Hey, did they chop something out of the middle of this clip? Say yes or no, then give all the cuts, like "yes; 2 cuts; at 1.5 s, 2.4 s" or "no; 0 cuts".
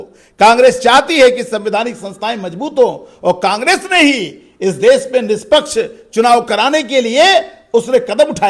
no; 0 cuts